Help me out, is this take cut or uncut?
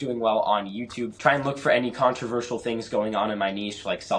cut